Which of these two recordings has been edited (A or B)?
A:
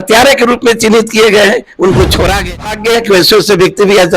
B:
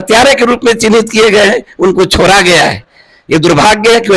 A